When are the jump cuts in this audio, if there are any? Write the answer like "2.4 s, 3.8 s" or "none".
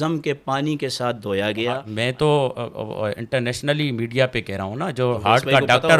1.9 s